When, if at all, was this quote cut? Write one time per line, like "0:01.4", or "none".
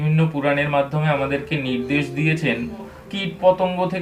0:02.9